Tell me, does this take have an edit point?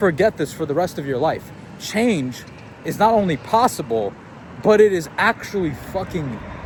no; 0 cuts

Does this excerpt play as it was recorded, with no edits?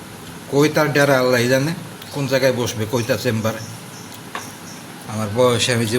no; 1 cut; at 5.0 s

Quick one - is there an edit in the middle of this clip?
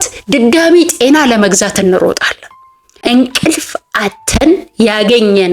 yes; 1 cut; at 3.0 s

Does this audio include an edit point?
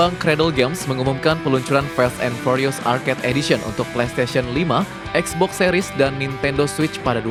no; 0 cuts

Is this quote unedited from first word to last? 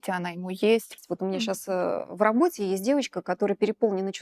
no; 1 cut; at 0.9 s

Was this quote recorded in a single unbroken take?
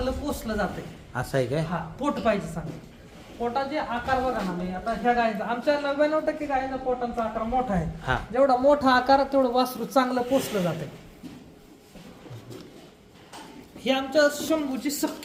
yes; 0 cuts

